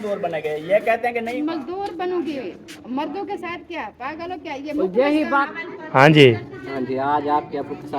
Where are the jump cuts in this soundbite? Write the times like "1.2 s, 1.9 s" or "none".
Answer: 1.3 s, 5.4 s